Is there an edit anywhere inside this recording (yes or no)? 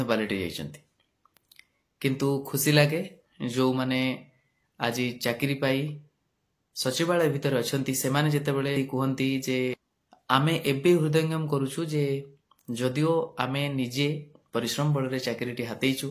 yes